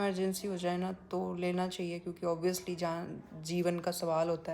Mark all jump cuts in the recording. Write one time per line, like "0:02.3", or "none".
none